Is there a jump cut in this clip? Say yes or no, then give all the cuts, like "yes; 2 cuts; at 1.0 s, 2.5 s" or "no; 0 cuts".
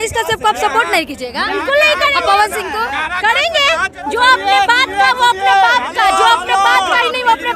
yes; 1 cut; at 4.2 s